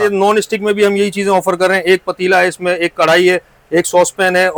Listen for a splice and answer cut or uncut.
uncut